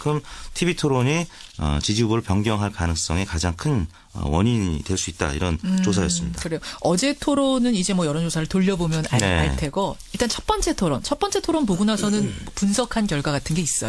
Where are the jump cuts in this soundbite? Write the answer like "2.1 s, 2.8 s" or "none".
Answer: none